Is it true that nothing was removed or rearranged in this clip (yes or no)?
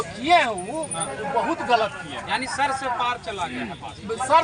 yes